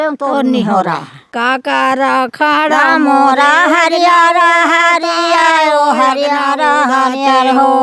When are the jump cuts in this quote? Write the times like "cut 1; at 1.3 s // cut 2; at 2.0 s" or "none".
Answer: cut 1; at 1.3 s

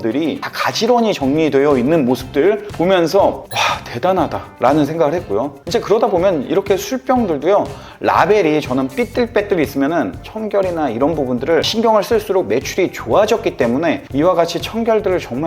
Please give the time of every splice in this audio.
cut 1; at 10.2 s // cut 2; at 14.0 s

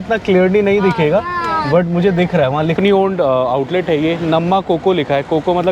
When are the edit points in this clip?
cut 1; at 2.8 s

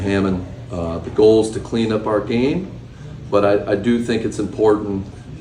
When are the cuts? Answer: cut 1; at 3.6 s

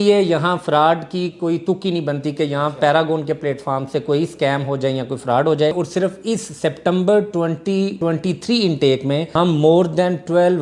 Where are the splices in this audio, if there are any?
cut 1; at 5.7 s // cut 2; at 7.9 s // cut 3; at 9.3 s

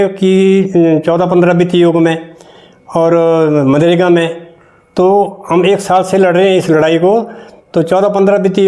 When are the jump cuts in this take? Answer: none

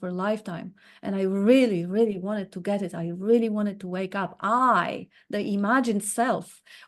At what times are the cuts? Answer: none

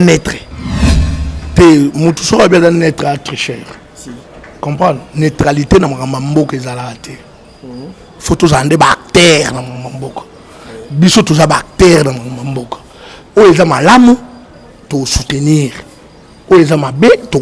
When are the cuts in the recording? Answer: none

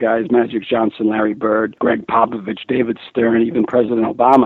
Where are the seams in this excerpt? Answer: none

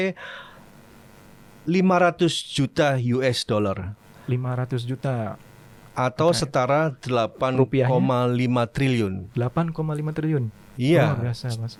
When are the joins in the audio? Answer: none

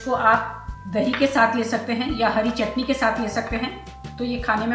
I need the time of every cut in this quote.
none

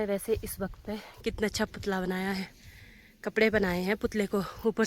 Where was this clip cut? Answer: cut 1; at 1.1 s

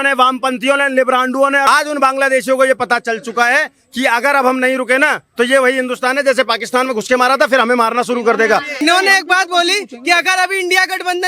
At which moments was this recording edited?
cut 1; at 1.7 s // cut 2; at 8.7 s

